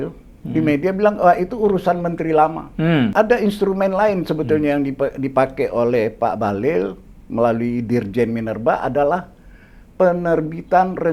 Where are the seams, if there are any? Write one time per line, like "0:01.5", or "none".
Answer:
0:03.1